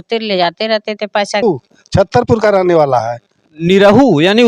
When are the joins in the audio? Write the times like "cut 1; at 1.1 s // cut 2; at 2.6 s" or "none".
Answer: cut 1; at 1.4 s